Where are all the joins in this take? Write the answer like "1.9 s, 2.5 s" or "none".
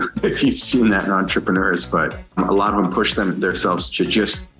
2.3 s